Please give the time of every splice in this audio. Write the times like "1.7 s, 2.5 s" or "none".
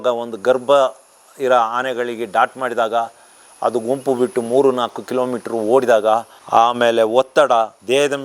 none